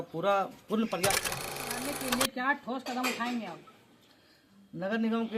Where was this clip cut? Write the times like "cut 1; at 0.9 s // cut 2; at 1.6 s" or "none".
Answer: cut 1; at 1.7 s